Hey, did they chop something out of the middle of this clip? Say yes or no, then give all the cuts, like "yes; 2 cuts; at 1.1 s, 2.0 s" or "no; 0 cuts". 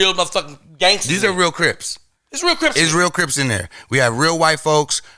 no; 0 cuts